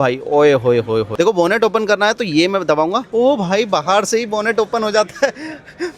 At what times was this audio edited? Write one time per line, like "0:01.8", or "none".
none

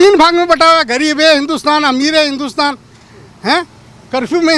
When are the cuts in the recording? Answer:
none

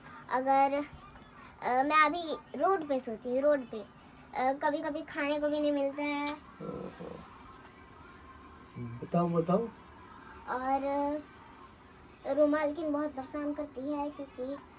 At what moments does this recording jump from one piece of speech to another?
none

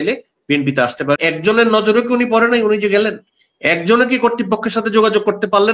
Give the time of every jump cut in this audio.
0:01.2

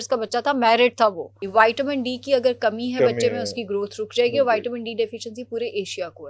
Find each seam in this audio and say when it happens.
0:01.4

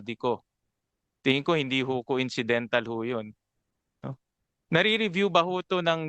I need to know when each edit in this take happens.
none

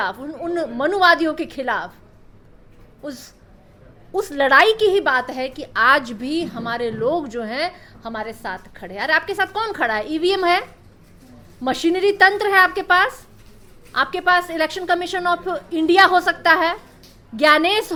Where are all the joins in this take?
none

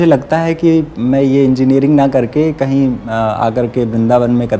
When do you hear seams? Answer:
none

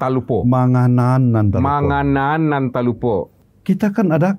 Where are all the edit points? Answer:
0:03.4

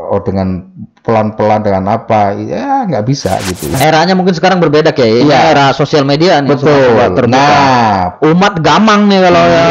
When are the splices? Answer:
0:03.7

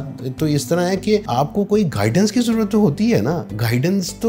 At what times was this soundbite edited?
0:01.3

